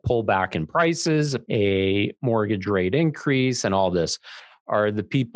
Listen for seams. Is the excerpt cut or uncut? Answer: cut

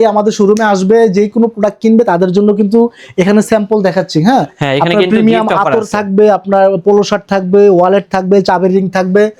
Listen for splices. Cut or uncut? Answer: uncut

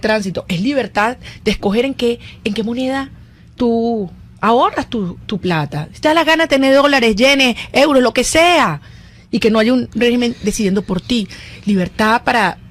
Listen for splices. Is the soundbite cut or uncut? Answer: uncut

